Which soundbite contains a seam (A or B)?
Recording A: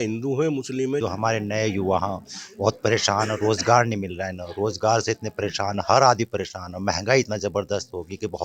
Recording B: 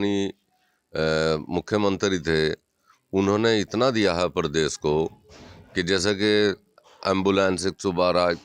A